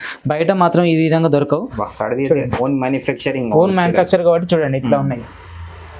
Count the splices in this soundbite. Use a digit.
1